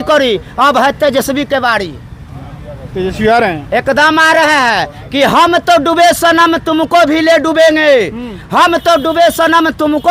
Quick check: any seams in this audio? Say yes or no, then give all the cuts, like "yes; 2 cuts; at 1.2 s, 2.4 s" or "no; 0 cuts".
no; 0 cuts